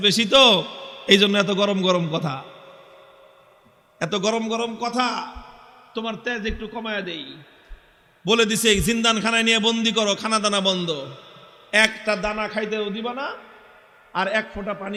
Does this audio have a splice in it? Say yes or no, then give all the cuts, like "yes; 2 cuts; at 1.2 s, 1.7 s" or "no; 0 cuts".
no; 0 cuts